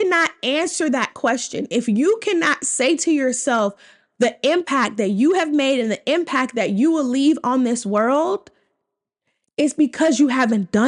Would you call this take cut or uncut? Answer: uncut